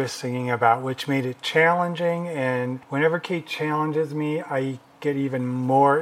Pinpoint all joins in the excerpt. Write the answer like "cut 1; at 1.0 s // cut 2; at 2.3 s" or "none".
none